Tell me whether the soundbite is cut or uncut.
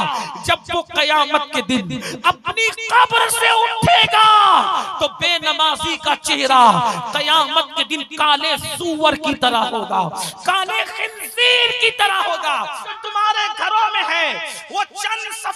cut